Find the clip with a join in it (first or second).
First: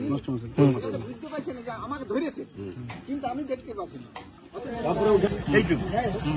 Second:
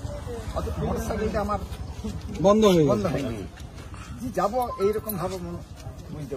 first